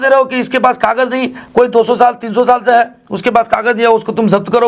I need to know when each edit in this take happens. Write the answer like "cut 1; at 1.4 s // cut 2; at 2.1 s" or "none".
none